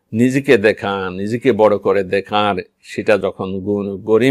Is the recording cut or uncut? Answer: cut